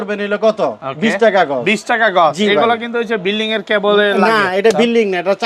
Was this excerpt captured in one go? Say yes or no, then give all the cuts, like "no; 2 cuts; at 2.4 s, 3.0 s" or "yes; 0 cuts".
yes; 0 cuts